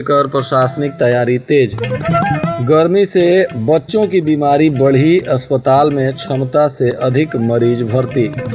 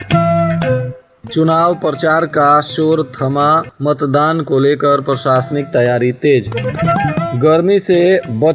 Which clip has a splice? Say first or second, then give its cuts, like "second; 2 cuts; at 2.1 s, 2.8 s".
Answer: second; 1 cut; at 0.9 s